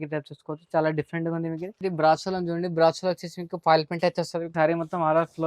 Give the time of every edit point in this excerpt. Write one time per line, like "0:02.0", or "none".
0:01.8
0:04.5